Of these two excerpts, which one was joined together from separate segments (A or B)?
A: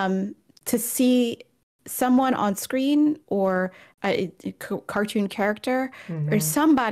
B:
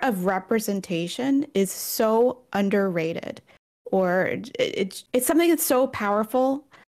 B